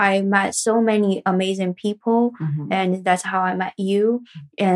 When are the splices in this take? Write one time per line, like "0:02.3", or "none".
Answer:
none

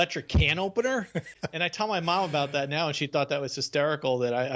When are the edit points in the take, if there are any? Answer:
0:01.2

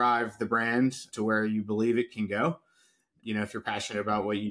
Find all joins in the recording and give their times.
none

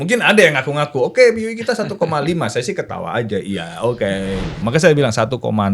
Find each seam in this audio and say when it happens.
0:04.6

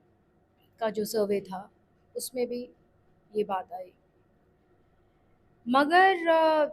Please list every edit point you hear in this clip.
none

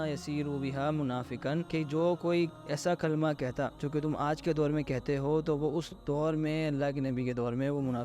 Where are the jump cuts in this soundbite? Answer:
0:01.7
0:03.8

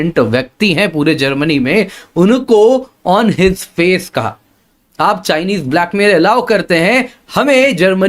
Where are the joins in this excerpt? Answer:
none

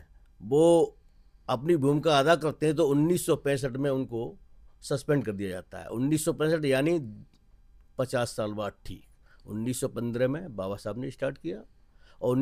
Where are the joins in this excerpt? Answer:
none

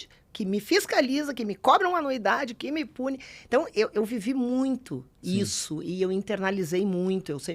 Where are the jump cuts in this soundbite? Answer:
none

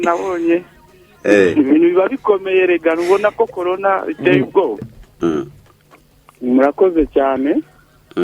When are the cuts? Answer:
0:05.0

